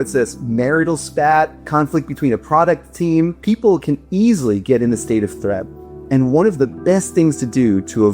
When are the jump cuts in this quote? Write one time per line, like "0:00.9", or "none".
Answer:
0:01.6
0:03.4